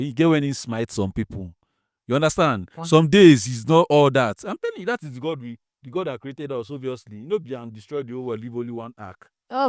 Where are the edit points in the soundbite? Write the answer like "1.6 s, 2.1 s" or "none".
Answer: none